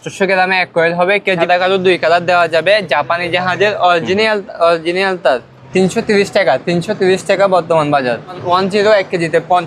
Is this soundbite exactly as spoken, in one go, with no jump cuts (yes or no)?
no